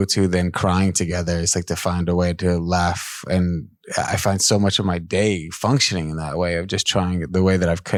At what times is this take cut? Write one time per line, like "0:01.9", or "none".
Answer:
none